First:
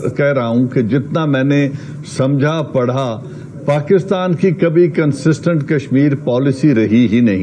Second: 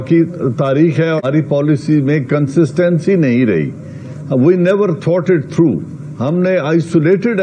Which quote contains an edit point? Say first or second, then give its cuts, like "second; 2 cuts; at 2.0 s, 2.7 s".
second; 1 cut; at 1.2 s